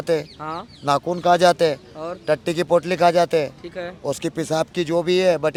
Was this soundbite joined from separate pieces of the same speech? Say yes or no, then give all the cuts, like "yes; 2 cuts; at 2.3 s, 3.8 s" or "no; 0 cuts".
no; 0 cuts